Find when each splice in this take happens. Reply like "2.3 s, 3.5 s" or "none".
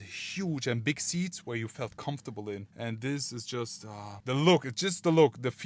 none

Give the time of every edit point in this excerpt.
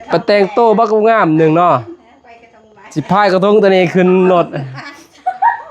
none

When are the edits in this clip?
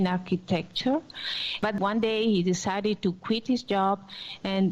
1.5 s

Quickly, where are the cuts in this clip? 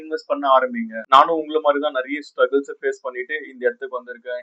0.9 s

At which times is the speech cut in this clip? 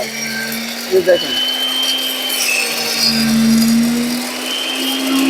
none

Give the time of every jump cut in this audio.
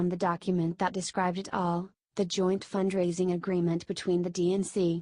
none

